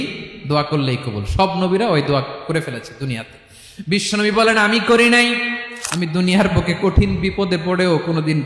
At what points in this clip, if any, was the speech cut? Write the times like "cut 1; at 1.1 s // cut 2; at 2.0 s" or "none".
cut 1; at 5.6 s